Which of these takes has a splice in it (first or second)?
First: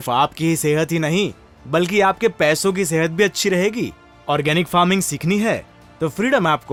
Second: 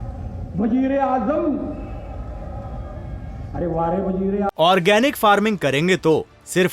second